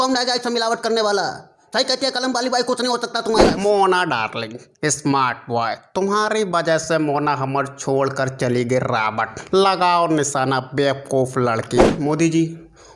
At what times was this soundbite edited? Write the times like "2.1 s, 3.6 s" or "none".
3.5 s, 11.9 s